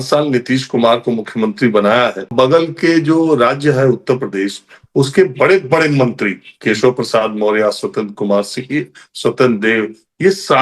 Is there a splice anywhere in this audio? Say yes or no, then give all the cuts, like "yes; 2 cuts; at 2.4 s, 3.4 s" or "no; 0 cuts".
yes; 1 cut; at 2.2 s